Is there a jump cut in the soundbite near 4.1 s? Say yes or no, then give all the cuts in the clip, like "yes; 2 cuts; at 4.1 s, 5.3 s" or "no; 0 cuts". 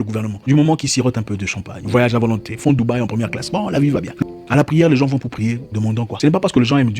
yes; 1 cut; at 4.1 s